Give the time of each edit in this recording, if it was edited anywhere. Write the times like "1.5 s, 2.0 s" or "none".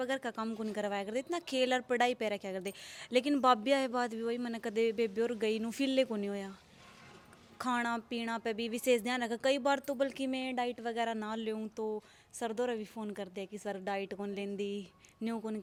none